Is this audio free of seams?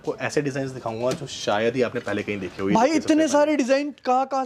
yes; 0 cuts

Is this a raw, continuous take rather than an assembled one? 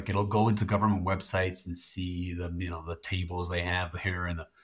yes; 0 cuts

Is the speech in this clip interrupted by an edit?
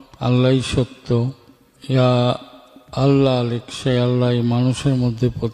no; 0 cuts

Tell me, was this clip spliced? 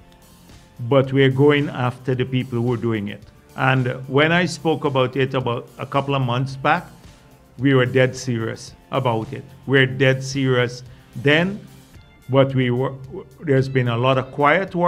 no; 0 cuts

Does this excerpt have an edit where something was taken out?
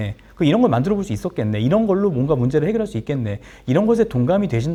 no; 0 cuts

